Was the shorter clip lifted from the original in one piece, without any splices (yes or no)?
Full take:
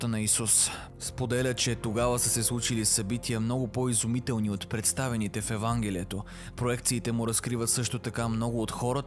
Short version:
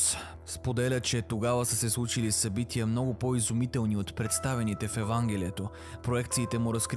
yes